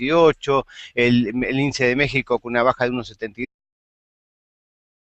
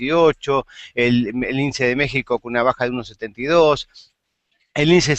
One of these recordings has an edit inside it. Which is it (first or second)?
second